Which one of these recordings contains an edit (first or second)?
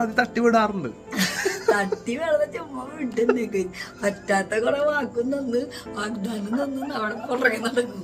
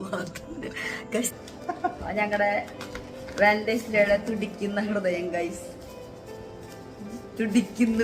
second